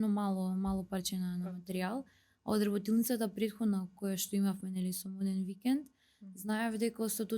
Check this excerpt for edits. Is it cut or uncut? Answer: uncut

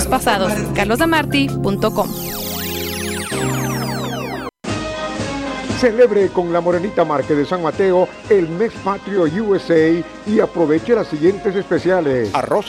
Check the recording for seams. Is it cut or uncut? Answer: cut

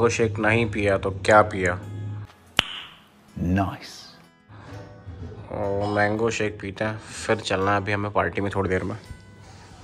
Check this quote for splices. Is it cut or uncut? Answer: uncut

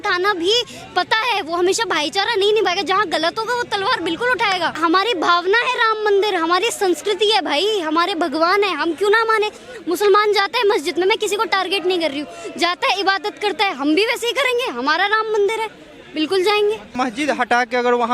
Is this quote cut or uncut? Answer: cut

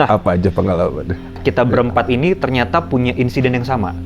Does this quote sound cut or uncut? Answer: cut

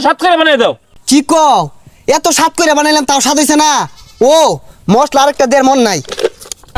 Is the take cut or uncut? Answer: uncut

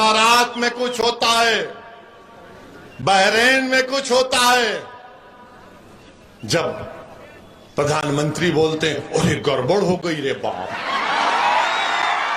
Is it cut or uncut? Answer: uncut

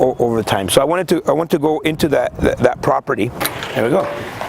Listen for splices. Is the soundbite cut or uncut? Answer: cut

